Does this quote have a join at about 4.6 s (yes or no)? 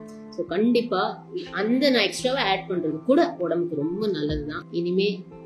yes